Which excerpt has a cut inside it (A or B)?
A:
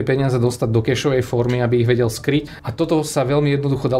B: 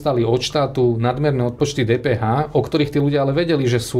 A